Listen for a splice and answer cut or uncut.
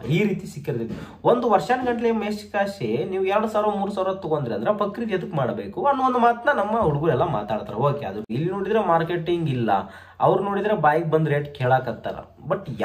cut